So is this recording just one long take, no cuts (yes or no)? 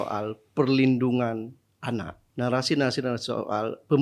no